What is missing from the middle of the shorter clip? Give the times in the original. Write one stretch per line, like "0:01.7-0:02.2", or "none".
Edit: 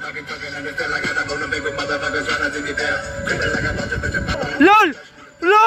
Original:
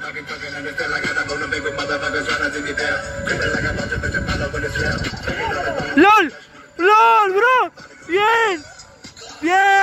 0:04.3-0:05.7